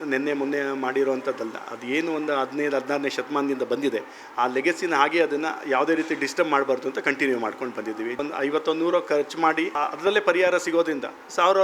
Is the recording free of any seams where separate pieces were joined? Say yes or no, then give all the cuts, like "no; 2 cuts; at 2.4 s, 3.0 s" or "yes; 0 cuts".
no; 2 cuts; at 8.2 s, 9.7 s